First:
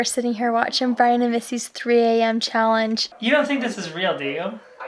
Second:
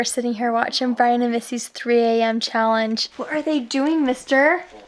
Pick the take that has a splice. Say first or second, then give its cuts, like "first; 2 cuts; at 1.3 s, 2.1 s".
first; 1 cut; at 3.1 s